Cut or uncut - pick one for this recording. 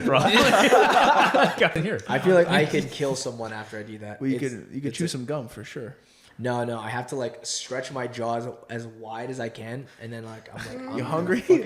cut